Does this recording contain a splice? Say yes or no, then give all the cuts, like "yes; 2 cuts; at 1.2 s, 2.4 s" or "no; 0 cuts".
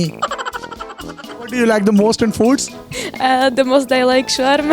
yes; 1 cut; at 1.2 s